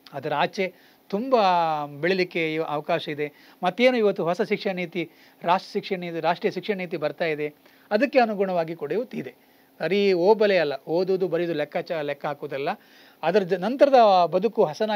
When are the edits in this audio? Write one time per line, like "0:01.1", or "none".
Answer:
none